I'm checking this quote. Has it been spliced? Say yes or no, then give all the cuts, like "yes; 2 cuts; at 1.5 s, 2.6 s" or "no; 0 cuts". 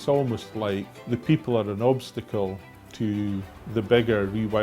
yes; 2 cuts; at 0.9 s, 3.6 s